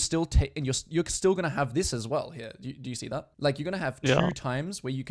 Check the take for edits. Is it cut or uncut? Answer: cut